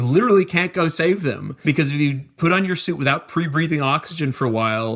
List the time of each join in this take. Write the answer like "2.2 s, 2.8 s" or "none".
1.6 s